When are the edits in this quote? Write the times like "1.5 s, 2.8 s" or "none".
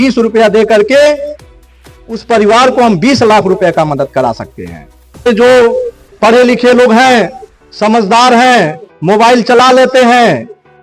5.3 s